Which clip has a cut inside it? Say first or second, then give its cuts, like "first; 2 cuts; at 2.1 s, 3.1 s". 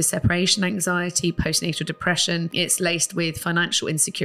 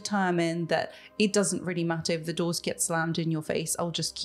first; 1 cut; at 2.5 s